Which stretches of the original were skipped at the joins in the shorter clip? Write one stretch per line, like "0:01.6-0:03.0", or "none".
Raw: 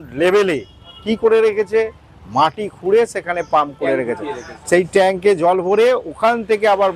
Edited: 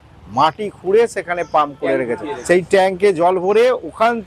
0:04.3-0:04.5